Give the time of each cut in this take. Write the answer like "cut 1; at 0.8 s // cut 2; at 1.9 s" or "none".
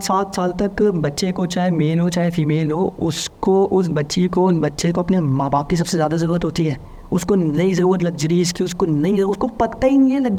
none